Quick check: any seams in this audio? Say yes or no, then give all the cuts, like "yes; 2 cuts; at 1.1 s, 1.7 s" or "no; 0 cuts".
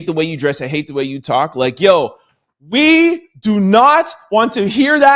no; 0 cuts